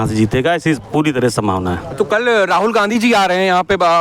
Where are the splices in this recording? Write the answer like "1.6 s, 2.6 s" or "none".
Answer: none

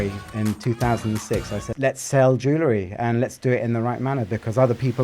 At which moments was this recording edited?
1.6 s

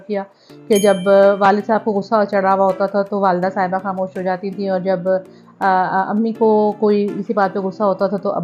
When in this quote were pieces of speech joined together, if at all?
none

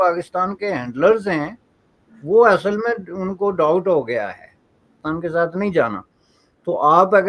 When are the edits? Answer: 5.0 s

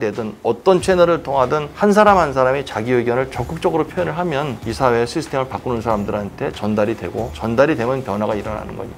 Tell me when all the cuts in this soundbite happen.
none

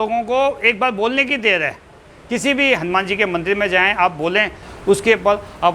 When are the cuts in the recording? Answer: 4.6 s

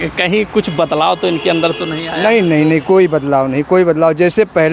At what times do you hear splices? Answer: none

